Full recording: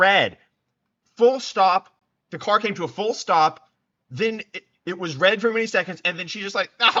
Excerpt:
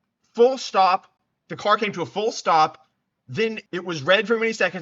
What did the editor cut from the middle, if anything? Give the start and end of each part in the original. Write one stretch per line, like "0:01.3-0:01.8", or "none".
0:04.1-0:04.4